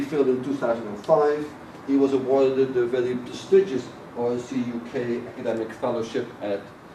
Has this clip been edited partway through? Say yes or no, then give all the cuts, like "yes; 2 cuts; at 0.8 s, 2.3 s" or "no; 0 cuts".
yes; 1 cut; at 3.3 s